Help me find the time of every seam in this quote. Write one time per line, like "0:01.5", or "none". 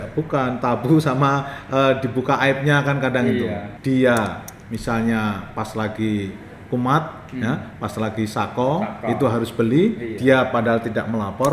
0:03.7